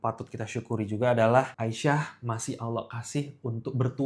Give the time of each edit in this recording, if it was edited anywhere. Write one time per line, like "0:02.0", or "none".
0:01.5